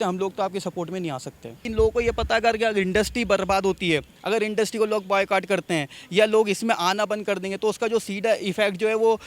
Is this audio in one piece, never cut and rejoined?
no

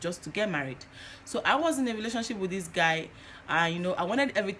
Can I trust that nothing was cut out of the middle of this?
yes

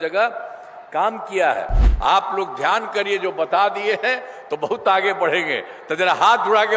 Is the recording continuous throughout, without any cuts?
no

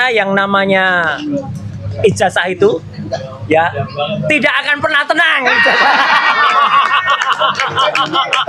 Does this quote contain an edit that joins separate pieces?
no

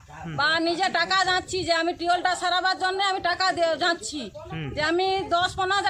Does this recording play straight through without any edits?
yes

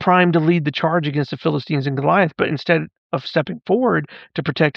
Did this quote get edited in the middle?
no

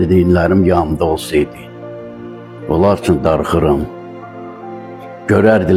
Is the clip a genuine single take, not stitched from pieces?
yes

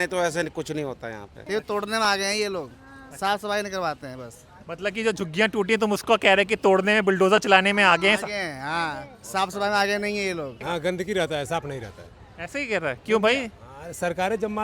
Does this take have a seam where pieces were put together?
yes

